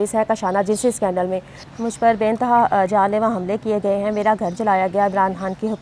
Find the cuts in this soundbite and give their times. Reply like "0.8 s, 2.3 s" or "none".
1.6 s